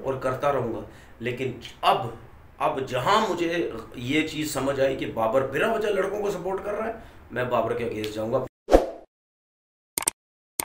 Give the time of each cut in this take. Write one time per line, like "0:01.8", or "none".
0:08.5